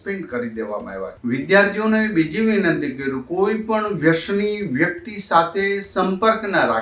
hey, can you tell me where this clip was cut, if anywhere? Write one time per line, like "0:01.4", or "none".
0:01.1